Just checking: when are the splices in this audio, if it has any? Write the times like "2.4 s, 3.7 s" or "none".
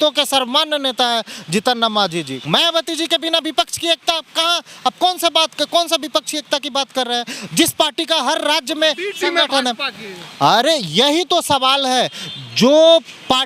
2.4 s